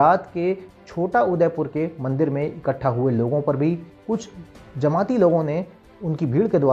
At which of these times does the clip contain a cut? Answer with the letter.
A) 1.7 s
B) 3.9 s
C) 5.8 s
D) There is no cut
B